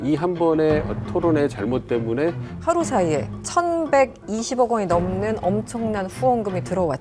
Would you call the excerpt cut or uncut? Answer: cut